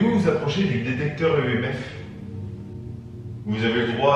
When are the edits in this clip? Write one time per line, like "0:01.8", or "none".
0:02.0